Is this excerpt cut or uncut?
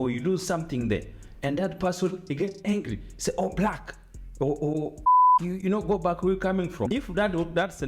cut